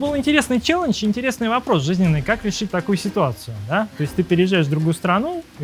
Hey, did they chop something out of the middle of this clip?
no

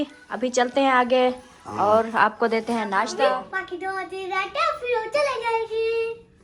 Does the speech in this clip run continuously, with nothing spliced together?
no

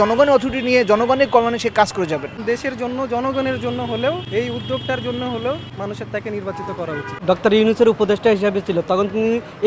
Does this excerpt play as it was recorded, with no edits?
no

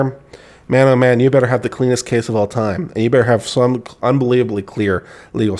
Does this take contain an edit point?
no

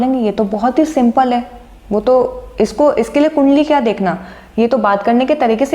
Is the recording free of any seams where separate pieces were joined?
yes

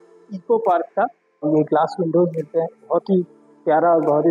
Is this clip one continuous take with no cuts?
no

